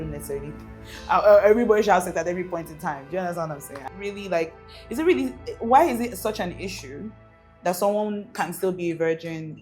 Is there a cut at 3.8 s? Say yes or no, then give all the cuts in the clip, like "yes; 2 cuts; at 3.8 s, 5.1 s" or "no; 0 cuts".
yes; 1 cut; at 3.8 s